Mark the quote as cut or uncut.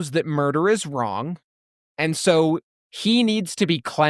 cut